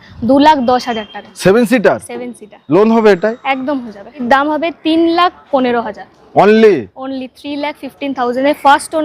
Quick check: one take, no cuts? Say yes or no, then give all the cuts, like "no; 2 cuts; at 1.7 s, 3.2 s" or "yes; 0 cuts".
no; 1 cut; at 4.2 s